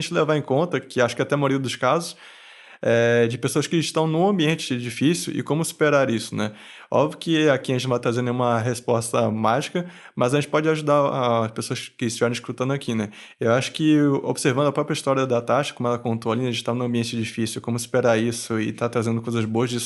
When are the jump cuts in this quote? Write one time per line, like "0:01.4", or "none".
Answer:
none